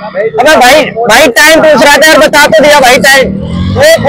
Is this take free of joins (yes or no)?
no